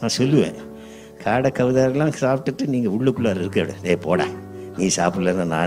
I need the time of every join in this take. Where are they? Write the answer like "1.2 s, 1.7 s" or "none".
none